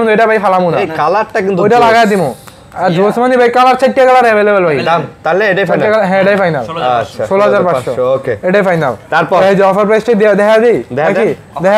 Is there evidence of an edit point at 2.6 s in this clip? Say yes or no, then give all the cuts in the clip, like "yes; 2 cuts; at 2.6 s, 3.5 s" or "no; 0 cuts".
no; 0 cuts